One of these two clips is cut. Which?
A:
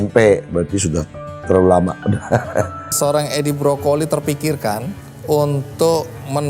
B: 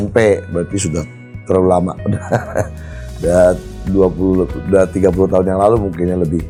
A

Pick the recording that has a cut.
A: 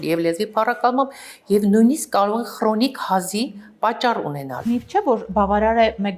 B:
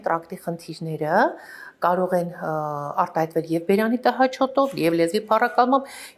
A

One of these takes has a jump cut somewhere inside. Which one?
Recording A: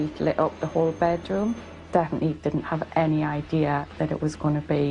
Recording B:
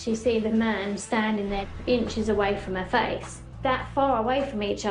A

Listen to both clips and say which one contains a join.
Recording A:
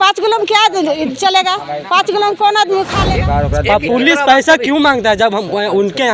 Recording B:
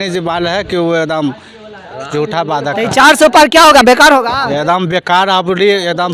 A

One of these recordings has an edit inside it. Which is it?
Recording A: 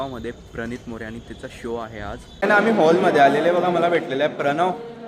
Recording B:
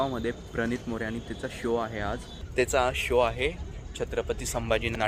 A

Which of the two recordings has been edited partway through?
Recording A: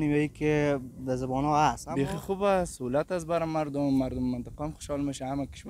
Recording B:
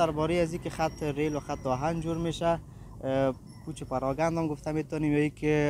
A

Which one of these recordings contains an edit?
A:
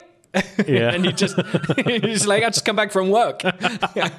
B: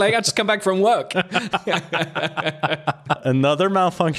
B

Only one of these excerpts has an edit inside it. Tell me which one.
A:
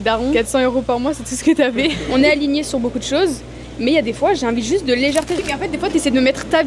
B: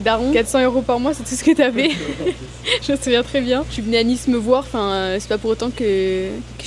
A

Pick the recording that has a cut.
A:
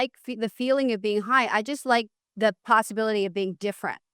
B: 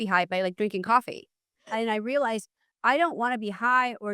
B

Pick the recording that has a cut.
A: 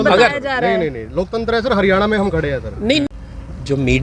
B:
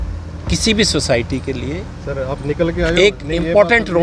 A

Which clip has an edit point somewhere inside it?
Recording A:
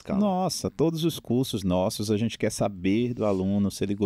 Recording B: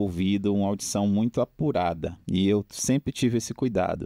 B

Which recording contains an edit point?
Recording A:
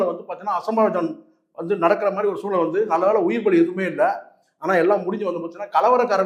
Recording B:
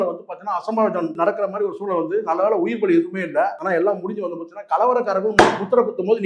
B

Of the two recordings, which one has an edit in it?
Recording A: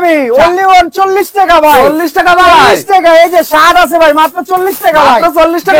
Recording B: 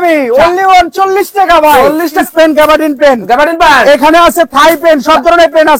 B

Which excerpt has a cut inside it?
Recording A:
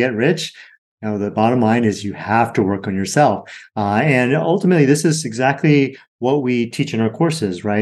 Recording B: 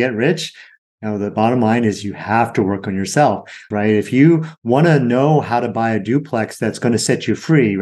B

